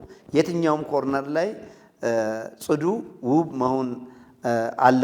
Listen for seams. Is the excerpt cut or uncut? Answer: uncut